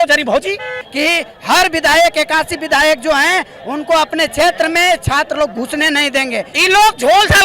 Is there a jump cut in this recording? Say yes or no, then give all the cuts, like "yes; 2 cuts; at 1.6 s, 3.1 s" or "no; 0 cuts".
yes; 2 cuts; at 0.9 s, 6.5 s